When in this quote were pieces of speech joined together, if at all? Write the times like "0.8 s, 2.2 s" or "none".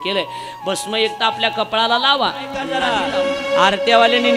2.7 s